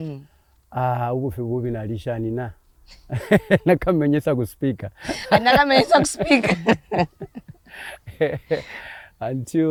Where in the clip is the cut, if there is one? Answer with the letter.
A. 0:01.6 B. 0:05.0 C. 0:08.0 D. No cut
D